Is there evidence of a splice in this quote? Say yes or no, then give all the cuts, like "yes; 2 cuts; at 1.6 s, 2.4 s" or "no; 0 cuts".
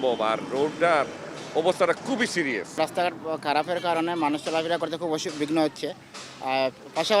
no; 0 cuts